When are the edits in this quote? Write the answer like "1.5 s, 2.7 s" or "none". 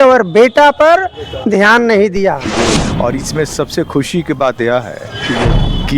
2.5 s